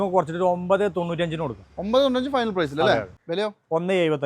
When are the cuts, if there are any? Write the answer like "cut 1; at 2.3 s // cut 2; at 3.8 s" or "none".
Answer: cut 1; at 3.2 s